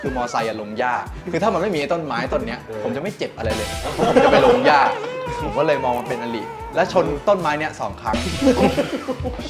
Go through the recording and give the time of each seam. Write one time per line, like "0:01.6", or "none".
none